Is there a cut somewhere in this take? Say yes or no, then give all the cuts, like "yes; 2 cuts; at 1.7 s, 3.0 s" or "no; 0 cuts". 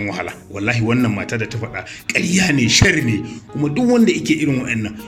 no; 0 cuts